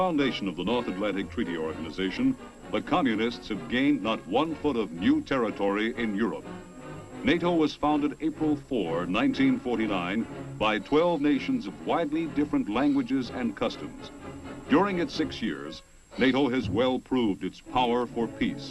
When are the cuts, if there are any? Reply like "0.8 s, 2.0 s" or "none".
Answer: 16.9 s

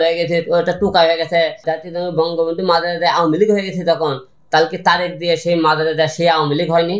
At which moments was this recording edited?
1.6 s

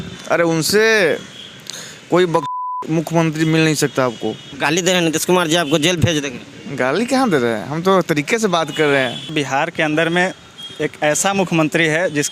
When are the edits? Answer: 4.6 s, 9.3 s

